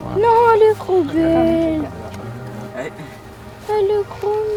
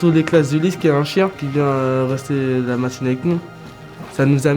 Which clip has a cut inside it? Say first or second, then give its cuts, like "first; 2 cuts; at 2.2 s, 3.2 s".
second; 1 cut; at 1.4 s